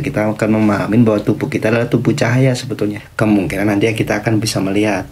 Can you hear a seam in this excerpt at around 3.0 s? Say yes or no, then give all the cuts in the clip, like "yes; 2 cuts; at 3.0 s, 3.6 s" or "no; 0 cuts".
yes; 1 cut; at 3.0 s